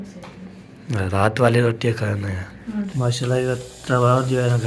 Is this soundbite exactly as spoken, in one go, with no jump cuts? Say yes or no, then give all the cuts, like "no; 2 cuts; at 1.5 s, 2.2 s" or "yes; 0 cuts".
no; 1 cut; at 2.9 s